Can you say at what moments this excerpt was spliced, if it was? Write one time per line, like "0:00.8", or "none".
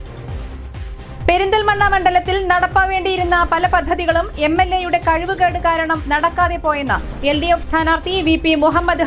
0:01.0